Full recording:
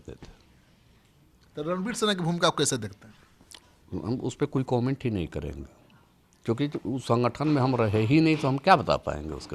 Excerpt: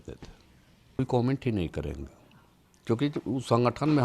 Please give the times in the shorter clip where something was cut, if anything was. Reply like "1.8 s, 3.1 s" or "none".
1.0 s